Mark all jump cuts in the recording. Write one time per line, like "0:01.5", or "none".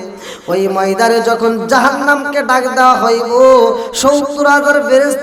none